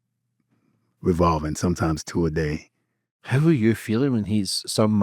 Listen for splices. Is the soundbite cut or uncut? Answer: cut